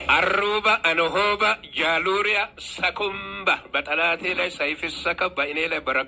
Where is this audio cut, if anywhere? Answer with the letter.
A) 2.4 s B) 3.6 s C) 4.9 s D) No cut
D